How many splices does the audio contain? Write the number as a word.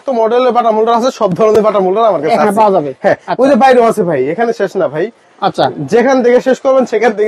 zero